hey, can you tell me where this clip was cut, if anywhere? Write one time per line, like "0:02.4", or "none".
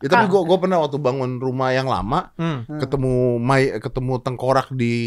none